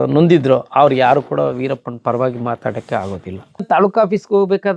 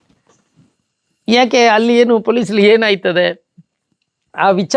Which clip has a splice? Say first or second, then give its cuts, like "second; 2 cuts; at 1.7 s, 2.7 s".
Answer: first; 1 cut; at 3.6 s